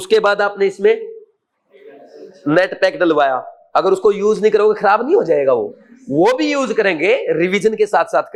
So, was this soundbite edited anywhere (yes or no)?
no